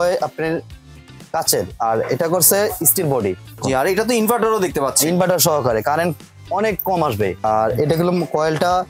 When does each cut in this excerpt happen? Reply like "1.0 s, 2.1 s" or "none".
3.6 s, 7.4 s